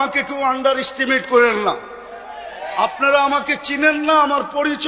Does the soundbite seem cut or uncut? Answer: uncut